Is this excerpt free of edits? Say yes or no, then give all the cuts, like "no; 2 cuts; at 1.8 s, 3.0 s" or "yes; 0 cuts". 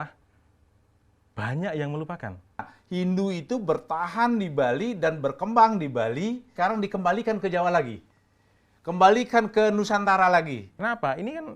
no; 3 cuts; at 2.8 s, 6.5 s, 10.7 s